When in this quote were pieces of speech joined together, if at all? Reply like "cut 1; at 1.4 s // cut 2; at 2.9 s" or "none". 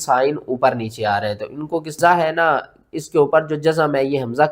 cut 1; at 2.0 s